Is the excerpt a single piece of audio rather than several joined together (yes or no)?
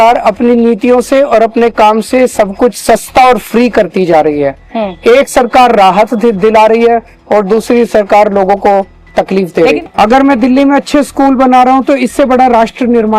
no